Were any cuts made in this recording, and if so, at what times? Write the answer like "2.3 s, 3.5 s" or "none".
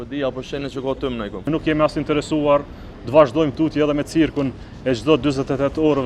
1.5 s